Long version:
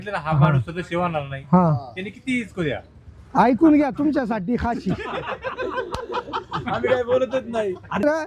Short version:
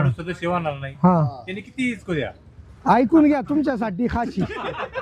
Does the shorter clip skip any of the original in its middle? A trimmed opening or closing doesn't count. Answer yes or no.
no